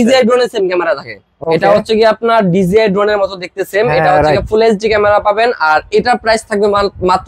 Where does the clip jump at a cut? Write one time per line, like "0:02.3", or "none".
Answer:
0:01.3